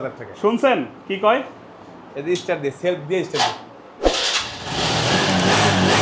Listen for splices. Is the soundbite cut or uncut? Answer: uncut